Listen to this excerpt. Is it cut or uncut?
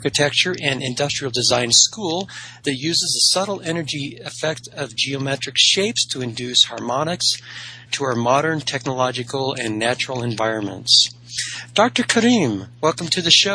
uncut